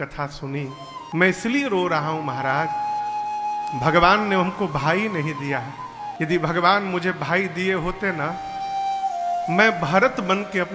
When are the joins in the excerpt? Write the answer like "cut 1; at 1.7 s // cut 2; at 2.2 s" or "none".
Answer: cut 1; at 1.1 s // cut 2; at 6.1 s